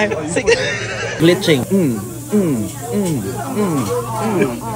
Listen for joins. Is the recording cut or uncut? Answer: uncut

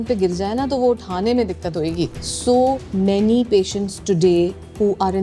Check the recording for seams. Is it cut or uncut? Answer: cut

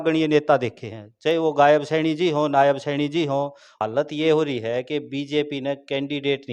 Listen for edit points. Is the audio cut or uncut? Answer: cut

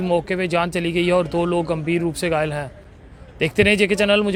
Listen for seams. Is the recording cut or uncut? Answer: uncut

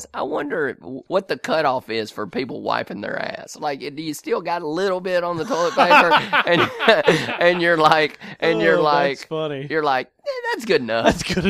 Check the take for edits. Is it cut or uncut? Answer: cut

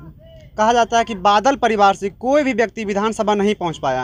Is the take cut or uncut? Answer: uncut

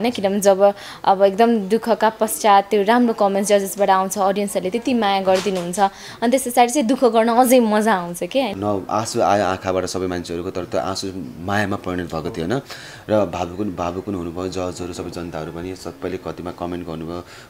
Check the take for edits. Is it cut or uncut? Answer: cut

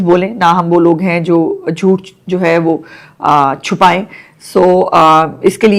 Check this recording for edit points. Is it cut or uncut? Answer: uncut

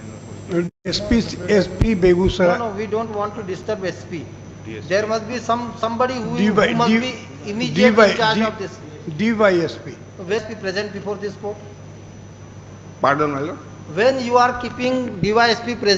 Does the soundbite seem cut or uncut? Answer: cut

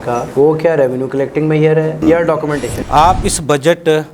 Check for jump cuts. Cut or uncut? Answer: cut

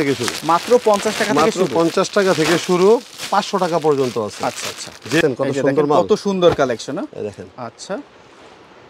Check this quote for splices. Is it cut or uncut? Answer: uncut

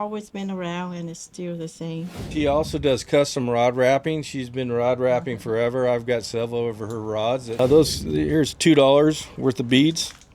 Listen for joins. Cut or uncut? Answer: cut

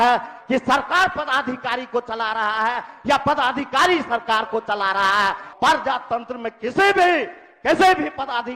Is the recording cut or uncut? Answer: cut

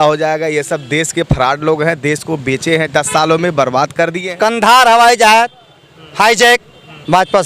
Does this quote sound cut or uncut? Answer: cut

